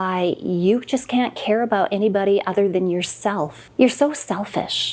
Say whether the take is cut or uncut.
cut